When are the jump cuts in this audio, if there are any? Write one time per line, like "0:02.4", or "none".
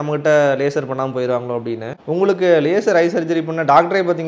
0:01.9

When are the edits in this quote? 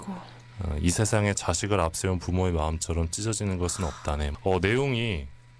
none

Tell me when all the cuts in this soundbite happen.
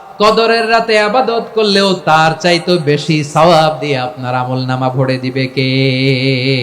0:02.0

